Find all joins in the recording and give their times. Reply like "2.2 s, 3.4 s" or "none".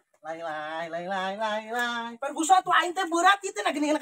none